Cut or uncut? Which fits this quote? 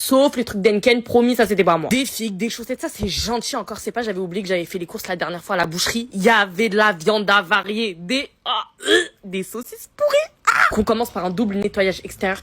cut